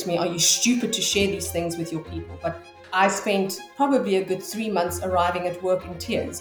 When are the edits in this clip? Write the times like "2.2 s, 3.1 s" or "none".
2.8 s

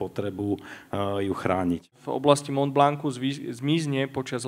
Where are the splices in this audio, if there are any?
2.0 s

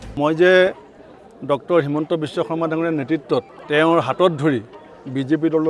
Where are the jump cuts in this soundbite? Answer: 3.6 s

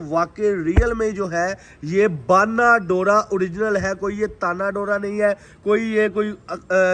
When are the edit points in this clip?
none

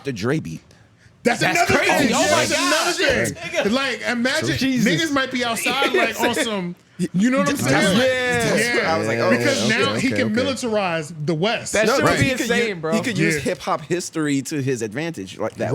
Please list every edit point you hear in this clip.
none

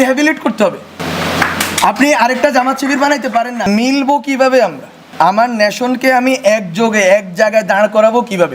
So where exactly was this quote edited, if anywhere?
1.0 s, 3.6 s, 5.1 s

